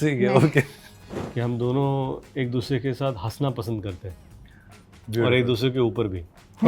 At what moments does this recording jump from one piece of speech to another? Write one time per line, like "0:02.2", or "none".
0:01.2